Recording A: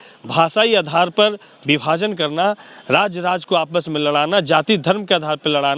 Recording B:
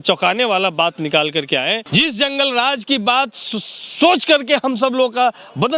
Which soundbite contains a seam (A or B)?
B